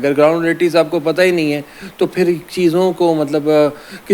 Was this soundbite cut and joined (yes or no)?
no